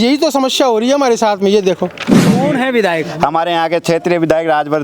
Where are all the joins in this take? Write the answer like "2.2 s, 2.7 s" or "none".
2.3 s